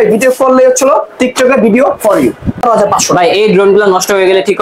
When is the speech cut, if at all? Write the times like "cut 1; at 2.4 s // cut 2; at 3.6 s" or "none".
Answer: cut 1; at 2.6 s